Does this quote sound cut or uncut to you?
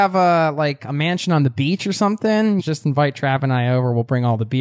cut